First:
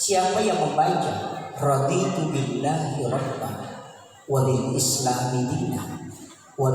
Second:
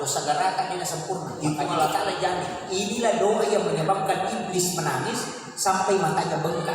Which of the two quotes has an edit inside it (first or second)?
second